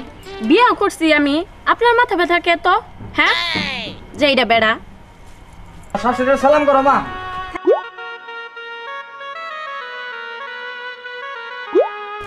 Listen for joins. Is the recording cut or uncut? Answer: cut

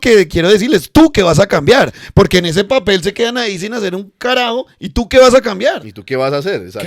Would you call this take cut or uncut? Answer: uncut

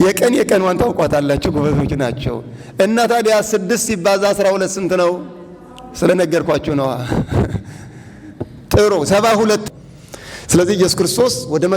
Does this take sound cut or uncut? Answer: cut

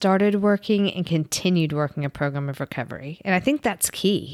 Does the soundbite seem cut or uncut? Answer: uncut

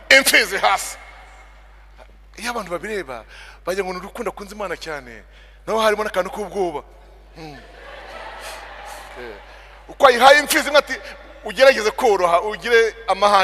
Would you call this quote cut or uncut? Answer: uncut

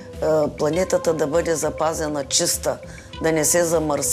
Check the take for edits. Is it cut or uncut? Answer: uncut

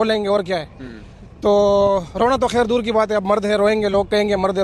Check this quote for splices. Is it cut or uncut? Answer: uncut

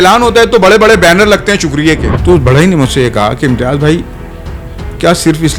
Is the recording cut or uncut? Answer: cut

